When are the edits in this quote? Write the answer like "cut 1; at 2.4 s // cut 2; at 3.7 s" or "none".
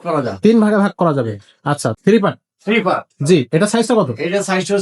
cut 1; at 1.9 s